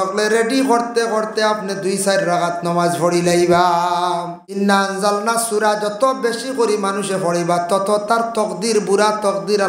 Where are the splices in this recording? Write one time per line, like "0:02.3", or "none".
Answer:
0:04.6